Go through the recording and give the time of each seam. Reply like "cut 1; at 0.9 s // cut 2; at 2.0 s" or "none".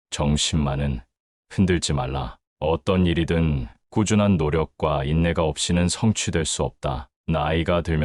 cut 1; at 7.1 s

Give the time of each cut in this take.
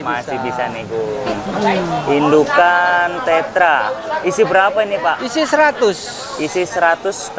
cut 1; at 1.3 s

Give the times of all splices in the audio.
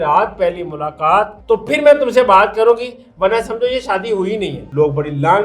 cut 1; at 1.4 s // cut 2; at 4.6 s

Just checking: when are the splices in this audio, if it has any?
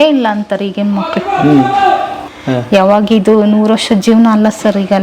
cut 1; at 2.2 s

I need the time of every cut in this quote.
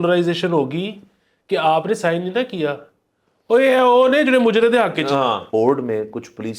cut 1; at 5.5 s

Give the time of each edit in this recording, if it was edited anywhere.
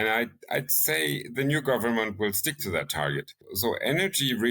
cut 1; at 3.5 s

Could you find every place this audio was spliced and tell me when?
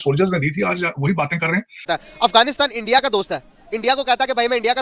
cut 1; at 1.8 s

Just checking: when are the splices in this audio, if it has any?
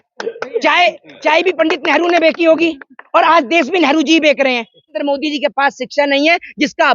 cut 1; at 5.0 s

